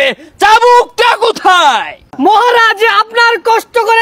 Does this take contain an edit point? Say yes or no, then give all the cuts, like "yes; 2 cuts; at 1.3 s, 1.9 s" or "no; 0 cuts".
yes; 1 cut; at 2.0 s